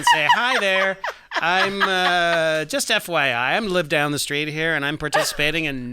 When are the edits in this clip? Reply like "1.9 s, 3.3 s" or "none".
none